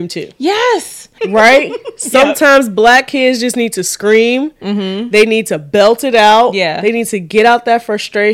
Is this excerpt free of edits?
no; 1 cut; at 1.1 s

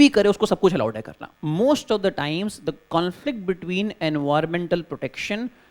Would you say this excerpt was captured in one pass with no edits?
no; 1 cut; at 1.2 s

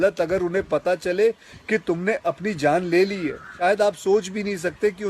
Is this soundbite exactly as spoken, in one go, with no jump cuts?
no; 1 cut; at 3.6 s

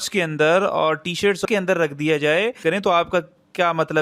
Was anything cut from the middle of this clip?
yes; 2 cuts; at 1.4 s, 2.6 s

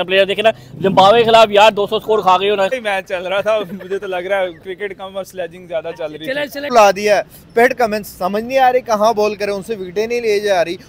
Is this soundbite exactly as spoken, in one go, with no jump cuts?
no; 2 cuts; at 2.7 s, 6.7 s

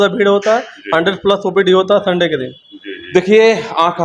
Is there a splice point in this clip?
no; 0 cuts

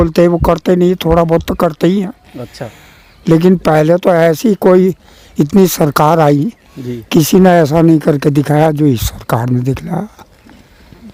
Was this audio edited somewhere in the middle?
no; 0 cuts

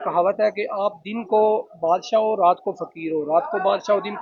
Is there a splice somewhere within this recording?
no; 0 cuts

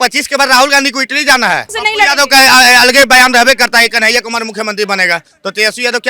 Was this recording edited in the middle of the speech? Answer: yes; 1 cut; at 1.8 s

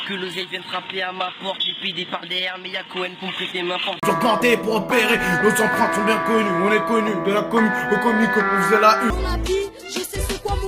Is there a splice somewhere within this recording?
yes; 2 cuts; at 4.0 s, 9.1 s

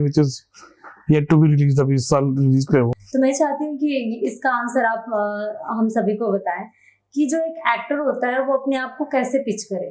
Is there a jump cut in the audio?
yes; 1 cut; at 3.0 s

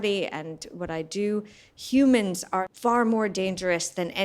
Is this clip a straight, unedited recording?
no; 1 cut; at 2.6 s

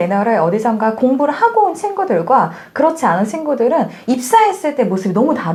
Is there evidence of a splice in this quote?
no; 0 cuts

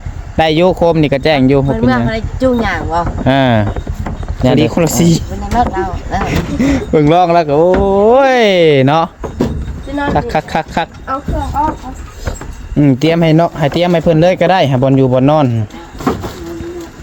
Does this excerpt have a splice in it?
yes; 1 cut; at 4.5 s

